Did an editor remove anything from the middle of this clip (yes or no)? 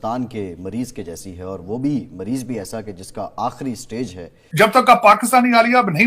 yes